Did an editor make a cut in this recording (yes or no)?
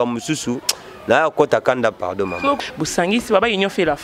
yes